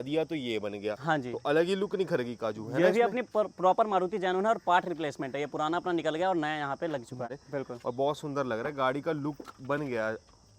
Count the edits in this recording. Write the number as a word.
zero